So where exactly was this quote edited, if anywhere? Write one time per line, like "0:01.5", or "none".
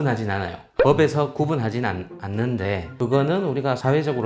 0:02.9